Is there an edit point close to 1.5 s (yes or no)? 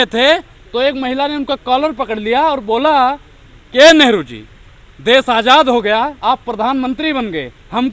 no